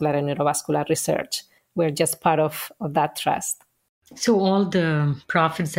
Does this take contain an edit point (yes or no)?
no